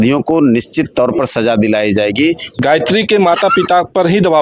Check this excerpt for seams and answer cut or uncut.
cut